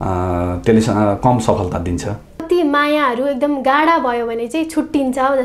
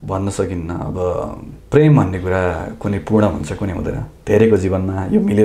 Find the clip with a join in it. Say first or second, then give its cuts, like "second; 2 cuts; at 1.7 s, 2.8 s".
first; 1 cut; at 2.4 s